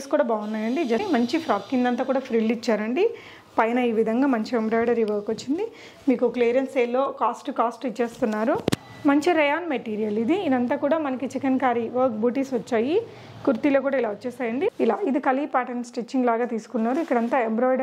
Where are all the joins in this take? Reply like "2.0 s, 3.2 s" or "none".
1.0 s, 8.9 s, 14.7 s